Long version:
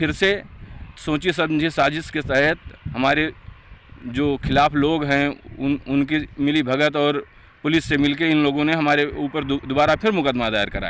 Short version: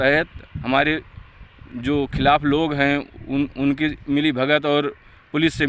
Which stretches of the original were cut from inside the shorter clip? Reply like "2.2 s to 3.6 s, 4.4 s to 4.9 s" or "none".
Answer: none